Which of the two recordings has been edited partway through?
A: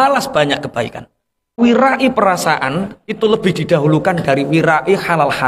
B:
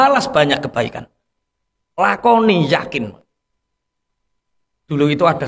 A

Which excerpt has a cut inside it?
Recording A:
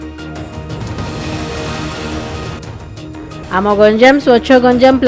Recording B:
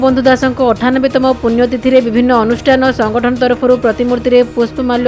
A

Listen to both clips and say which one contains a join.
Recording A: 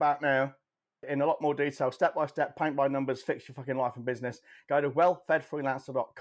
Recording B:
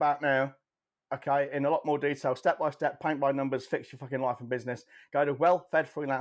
A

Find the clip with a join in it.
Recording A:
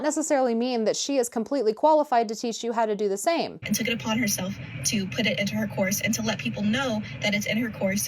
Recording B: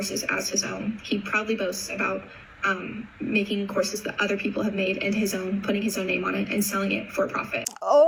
A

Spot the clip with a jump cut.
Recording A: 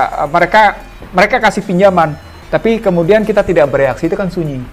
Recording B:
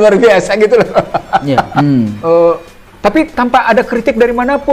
B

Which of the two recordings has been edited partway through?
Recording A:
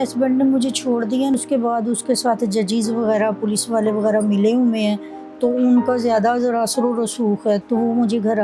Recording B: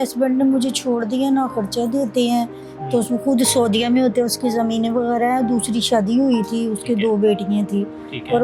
A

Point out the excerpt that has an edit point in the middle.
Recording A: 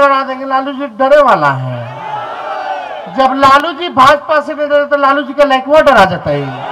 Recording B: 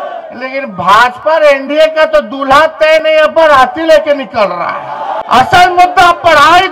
B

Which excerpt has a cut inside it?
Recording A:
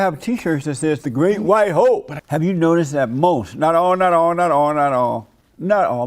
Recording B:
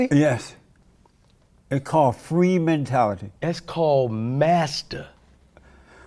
A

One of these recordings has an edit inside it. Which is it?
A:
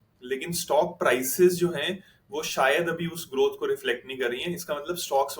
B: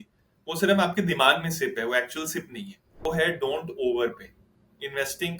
B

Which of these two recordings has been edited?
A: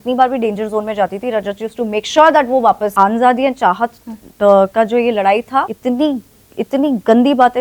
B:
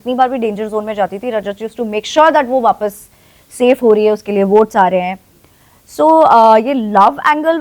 A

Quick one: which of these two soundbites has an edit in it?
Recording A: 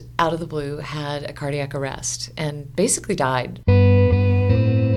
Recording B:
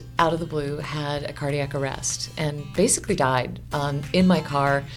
B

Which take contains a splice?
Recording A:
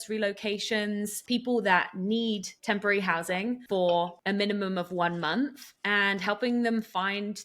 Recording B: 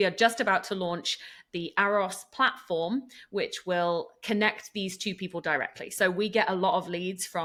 A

